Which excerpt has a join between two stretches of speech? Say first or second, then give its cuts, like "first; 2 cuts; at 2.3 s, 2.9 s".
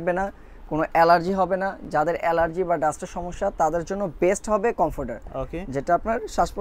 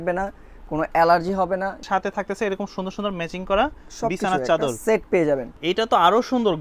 second; 2 cuts; at 1.8 s, 5.5 s